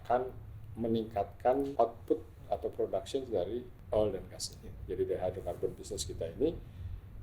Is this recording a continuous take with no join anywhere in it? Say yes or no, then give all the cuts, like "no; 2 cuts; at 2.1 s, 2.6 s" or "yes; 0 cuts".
no; 2 cuts; at 1.7 s, 3.7 s